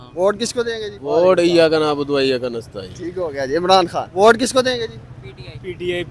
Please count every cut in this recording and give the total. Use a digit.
2